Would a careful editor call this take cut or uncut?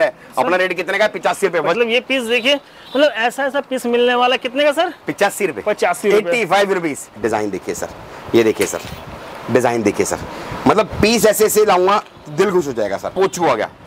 cut